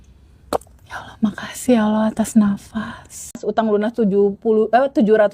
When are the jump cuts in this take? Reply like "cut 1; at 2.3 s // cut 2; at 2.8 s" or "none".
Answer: cut 1; at 3.4 s